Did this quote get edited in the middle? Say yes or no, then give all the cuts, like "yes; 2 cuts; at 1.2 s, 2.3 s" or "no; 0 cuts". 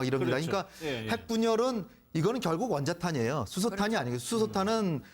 yes; 1 cut; at 1.5 s